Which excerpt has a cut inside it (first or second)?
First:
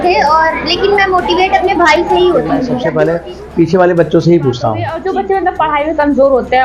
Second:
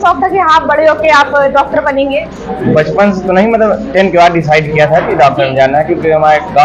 first